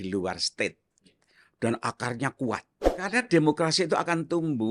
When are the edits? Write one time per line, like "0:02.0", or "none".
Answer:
0:03.1